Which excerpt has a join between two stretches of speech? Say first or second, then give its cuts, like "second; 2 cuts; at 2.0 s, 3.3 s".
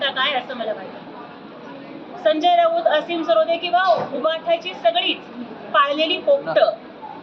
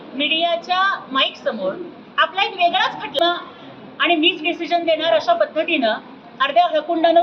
second; 1 cut; at 3.2 s